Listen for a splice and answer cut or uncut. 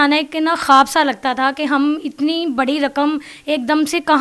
uncut